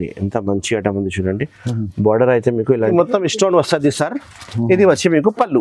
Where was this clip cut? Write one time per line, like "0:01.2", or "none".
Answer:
0:02.8